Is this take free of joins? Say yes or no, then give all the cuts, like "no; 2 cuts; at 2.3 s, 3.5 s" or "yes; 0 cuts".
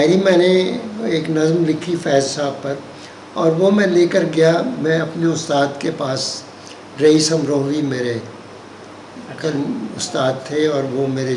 yes; 0 cuts